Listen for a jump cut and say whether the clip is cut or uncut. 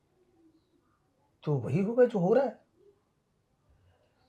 uncut